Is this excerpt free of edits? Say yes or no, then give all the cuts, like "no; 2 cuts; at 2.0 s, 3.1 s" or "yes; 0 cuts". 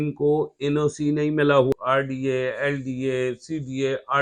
no; 1 cut; at 1.7 s